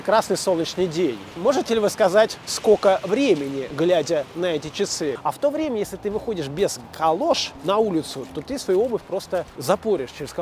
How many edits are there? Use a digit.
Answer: 5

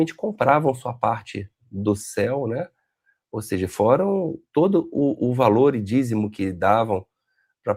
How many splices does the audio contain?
0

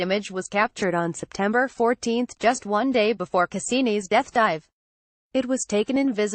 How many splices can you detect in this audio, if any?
1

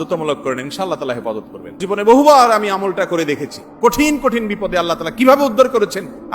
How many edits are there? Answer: 1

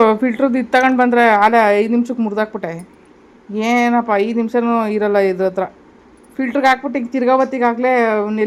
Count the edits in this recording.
0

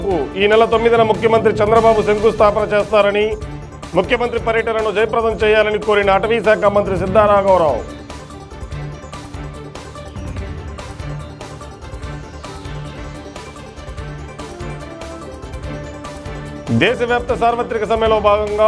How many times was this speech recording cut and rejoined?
0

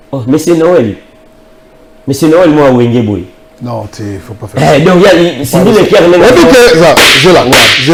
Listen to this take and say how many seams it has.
0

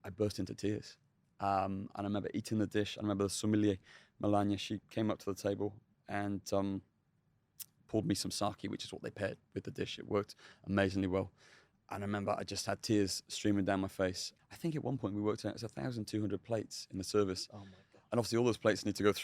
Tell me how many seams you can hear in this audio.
1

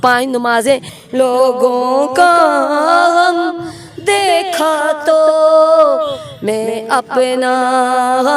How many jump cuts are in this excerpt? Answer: 1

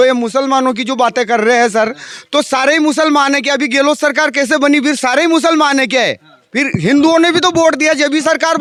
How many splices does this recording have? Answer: 0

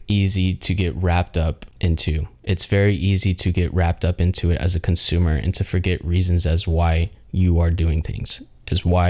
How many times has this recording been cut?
1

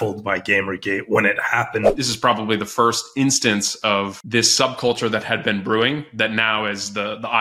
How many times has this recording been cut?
2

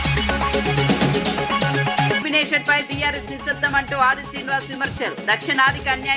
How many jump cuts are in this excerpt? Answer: 0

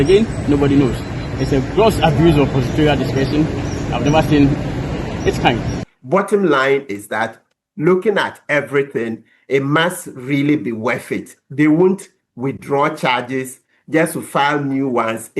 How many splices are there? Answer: 1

